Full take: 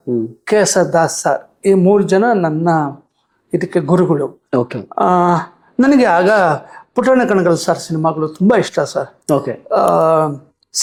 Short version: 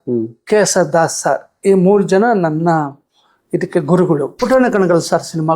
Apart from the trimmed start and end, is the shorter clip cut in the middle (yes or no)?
yes